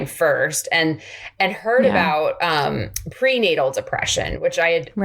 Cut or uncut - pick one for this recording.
uncut